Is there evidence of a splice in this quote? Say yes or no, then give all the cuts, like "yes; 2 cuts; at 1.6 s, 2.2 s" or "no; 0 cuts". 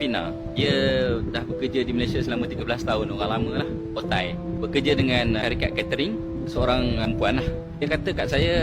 no; 0 cuts